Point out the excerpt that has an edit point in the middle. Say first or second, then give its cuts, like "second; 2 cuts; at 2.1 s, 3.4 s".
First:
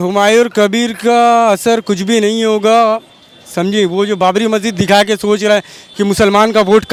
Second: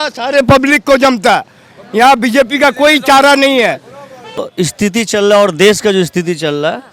second; 1 cut; at 4.4 s